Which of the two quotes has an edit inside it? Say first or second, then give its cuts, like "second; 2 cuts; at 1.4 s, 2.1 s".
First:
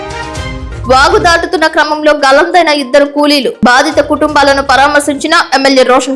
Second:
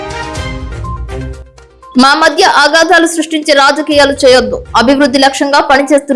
second; 2 cuts; at 0.8 s, 1.9 s